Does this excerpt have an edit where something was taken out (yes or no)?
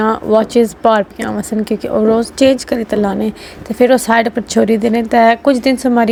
no